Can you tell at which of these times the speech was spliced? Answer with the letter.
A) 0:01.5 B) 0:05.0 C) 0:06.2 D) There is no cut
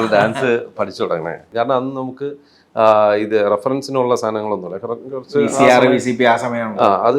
A